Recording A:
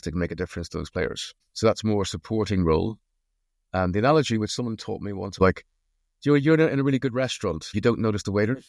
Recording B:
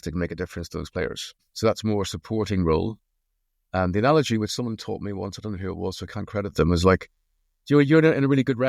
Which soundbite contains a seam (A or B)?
A